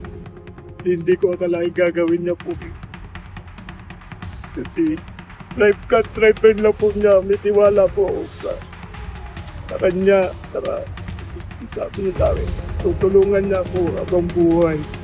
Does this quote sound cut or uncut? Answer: uncut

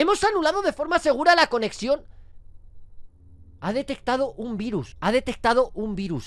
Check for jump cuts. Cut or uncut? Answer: uncut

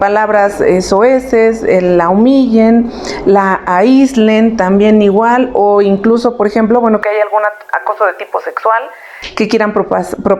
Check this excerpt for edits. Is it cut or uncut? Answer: uncut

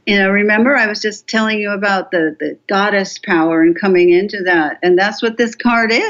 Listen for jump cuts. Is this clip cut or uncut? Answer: uncut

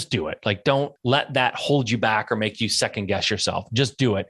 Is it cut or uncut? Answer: cut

